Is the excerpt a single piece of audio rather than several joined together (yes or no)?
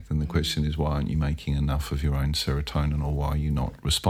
yes